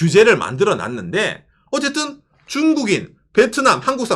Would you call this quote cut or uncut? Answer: uncut